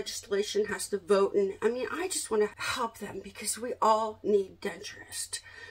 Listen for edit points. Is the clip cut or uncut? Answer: cut